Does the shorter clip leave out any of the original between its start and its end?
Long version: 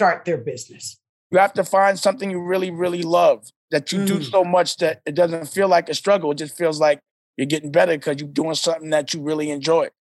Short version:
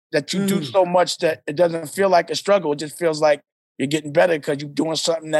no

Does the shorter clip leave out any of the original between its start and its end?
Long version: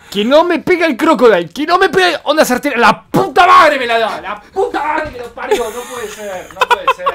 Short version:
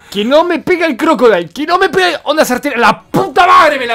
no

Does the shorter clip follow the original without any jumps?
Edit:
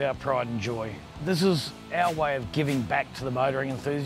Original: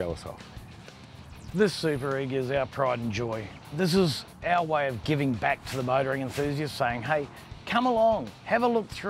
yes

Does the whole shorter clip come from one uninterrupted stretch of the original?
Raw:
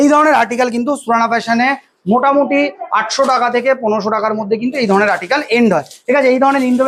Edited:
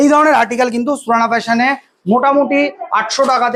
yes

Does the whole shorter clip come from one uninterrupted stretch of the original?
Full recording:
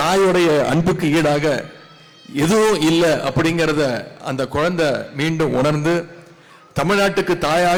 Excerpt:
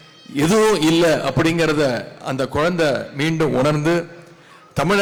yes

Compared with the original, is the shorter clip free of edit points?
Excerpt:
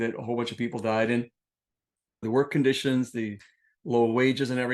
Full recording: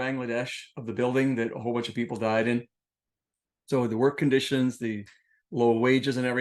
no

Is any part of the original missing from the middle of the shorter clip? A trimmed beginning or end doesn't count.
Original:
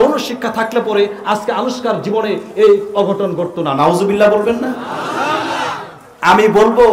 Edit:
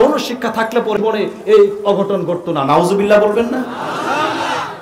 yes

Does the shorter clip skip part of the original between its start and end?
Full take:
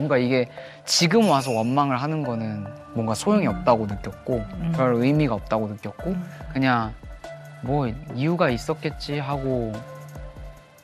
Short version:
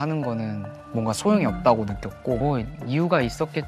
yes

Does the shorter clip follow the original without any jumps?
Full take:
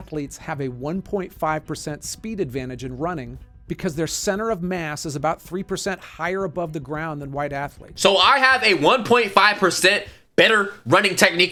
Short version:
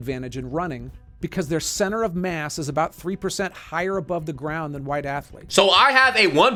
yes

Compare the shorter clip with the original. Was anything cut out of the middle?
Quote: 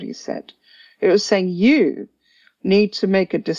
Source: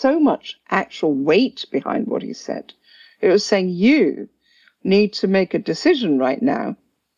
no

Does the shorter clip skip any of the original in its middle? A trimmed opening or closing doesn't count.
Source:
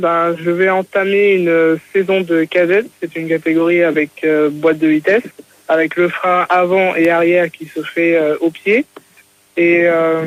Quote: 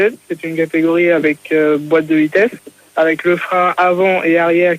no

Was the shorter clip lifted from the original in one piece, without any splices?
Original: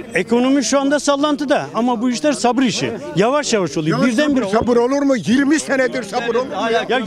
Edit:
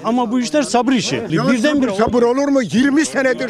no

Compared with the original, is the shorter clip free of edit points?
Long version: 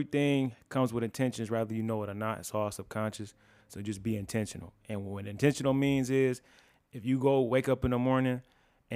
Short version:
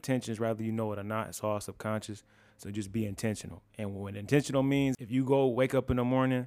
no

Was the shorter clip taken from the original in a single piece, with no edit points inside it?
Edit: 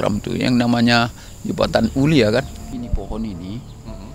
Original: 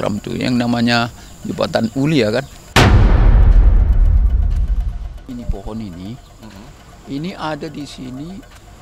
no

